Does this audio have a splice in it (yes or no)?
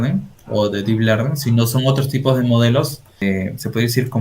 yes